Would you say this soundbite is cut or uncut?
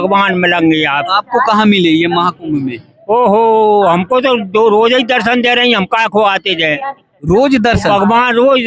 uncut